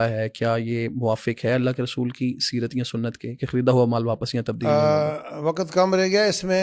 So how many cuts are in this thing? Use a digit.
0